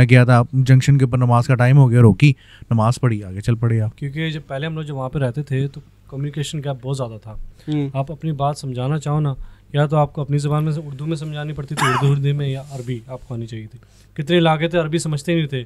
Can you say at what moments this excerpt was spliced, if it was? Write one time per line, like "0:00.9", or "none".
0:04.0